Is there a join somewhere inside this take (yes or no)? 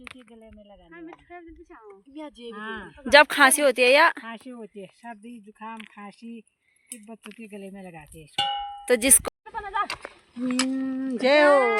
yes